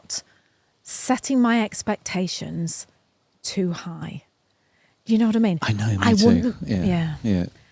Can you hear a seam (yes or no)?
no